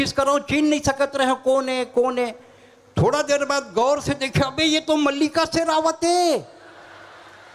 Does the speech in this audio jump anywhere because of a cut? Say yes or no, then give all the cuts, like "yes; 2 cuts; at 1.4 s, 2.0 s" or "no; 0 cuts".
no; 0 cuts